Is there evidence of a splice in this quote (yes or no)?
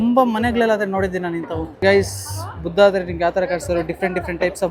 no